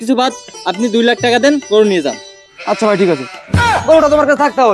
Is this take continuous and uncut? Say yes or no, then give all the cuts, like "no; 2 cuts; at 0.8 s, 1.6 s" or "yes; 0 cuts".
no; 1 cut; at 3.6 s